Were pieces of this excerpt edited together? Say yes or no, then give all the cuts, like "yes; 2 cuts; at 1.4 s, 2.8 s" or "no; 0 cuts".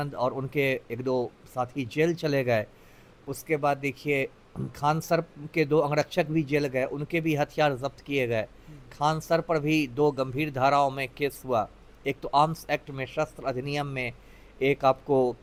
no; 0 cuts